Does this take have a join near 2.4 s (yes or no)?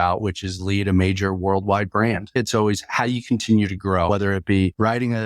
yes